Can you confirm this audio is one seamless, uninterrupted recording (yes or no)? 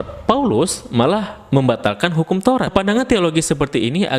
no